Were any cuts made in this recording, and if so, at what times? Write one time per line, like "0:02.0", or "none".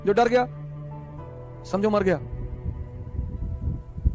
none